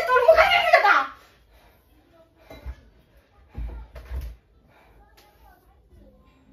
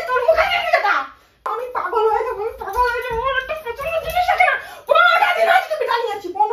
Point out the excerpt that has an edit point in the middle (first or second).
second